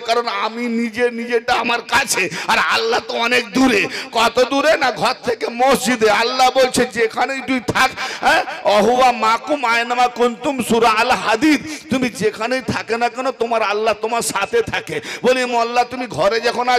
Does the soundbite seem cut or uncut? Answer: uncut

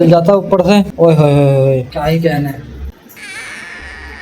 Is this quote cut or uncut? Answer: cut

